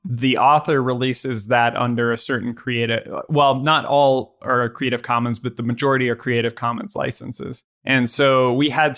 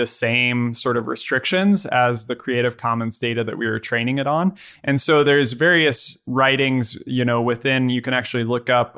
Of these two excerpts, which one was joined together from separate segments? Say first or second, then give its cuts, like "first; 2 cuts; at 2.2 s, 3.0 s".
first; 1 cut; at 7.7 s